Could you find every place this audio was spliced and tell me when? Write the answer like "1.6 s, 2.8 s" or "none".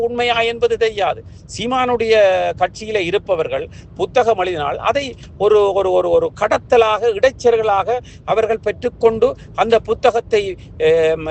none

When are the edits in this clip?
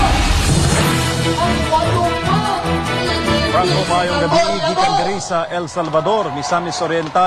2.6 s

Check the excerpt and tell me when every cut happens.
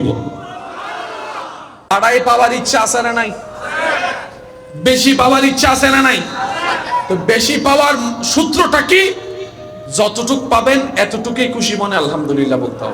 1.9 s

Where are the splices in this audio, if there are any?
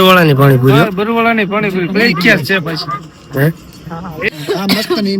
4.3 s

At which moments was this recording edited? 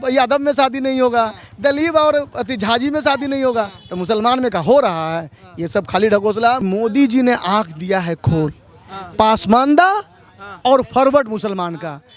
6.6 s

